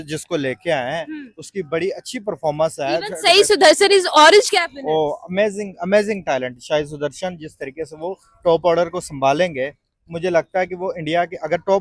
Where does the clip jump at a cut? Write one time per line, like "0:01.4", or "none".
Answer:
none

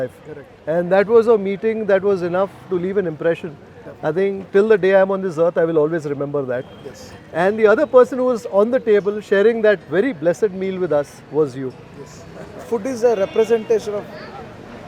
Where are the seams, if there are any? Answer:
0:12.4

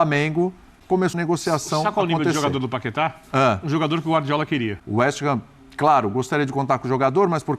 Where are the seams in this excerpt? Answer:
0:01.1
0:04.8

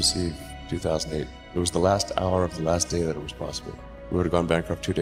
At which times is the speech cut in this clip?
none

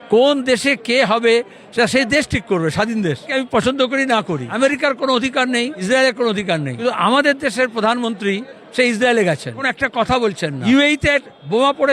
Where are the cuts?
0:03.3
0:04.5
0:05.8
0:06.7
0:09.7
0:10.6

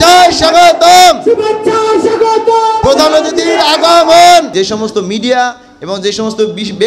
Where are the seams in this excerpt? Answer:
0:04.5

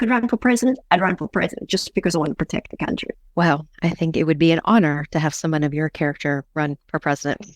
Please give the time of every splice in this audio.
0:03.2
0:06.5

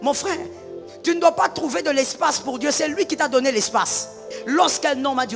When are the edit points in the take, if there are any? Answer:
0:04.4

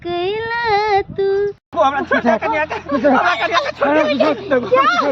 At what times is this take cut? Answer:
0:01.6

